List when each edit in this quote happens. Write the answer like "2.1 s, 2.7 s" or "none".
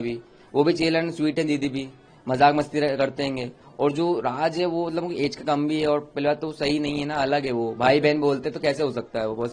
none

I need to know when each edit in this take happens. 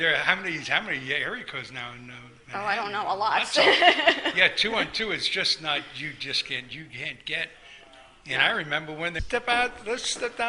none

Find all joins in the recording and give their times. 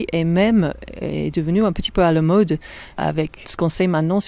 3.0 s

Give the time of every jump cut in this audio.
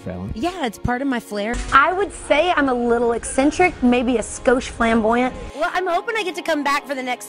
1.5 s, 5.4 s

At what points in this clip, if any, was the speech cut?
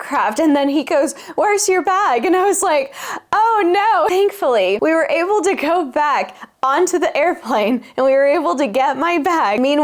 none

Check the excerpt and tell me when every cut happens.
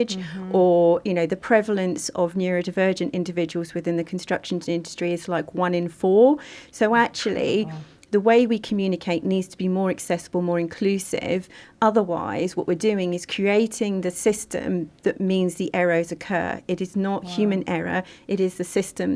none

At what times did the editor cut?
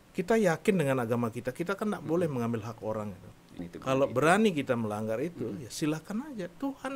3.6 s

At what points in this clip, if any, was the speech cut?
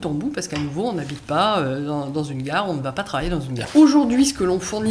3.6 s

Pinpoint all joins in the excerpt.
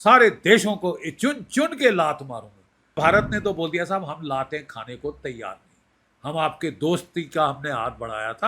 3.0 s

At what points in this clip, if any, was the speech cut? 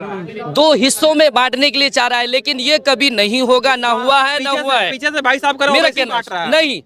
none

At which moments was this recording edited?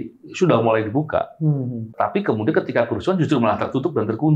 1.9 s

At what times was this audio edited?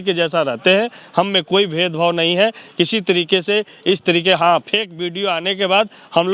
none

